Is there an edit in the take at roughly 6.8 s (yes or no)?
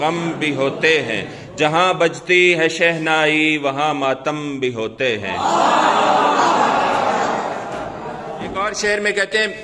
no